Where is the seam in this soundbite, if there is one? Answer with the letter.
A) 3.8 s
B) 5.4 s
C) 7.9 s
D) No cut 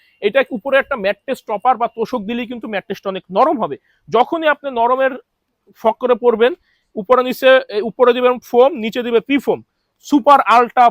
D